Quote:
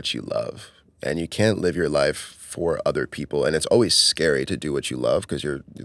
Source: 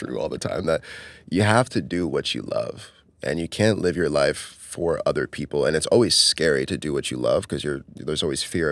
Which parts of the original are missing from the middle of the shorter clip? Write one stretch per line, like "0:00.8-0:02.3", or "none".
none